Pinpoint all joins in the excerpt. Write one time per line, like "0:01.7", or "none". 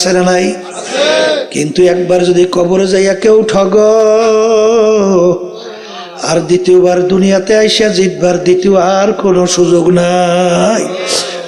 none